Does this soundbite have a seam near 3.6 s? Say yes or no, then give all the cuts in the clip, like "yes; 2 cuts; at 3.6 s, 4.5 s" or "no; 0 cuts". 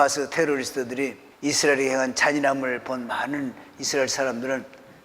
no; 1 cut; at 1.2 s